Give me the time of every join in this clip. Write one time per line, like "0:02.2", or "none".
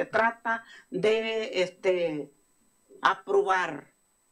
none